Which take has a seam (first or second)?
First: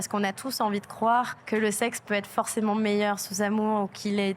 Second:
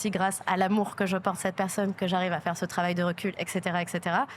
first